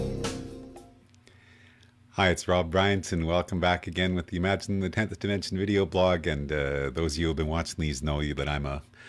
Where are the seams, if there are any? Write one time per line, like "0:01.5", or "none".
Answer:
0:04.6